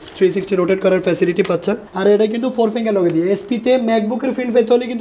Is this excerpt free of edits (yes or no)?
no